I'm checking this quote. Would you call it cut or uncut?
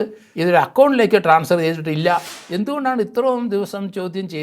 cut